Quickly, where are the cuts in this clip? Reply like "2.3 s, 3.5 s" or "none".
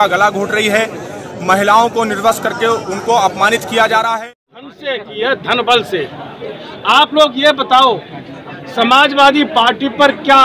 4.2 s